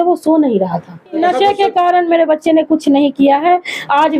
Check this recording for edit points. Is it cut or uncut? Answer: cut